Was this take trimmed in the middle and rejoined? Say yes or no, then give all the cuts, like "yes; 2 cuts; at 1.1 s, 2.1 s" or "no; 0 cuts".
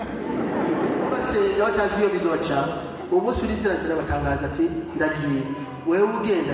yes; 1 cut; at 1.2 s